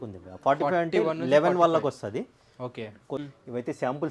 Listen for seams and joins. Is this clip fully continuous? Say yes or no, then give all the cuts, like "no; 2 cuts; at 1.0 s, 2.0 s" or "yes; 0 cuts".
no; 1 cut; at 3.2 s